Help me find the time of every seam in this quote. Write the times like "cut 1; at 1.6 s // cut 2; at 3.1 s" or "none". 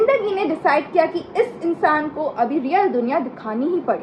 none